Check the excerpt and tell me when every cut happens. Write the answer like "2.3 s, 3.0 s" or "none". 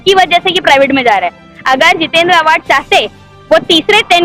none